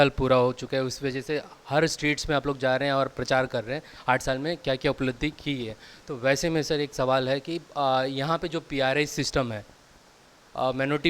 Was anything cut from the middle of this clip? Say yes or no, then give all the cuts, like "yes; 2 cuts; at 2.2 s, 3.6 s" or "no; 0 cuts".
no; 0 cuts